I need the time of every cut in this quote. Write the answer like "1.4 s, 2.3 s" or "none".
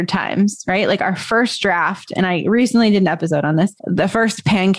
none